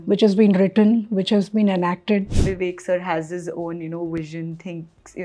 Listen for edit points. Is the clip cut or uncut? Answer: cut